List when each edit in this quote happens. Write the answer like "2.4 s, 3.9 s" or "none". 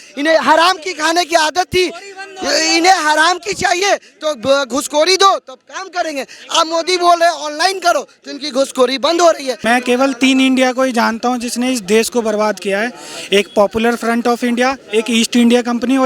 9.6 s